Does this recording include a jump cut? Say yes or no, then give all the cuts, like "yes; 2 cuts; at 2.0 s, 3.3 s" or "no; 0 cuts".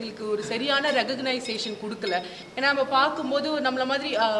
yes; 1 cut; at 2.4 s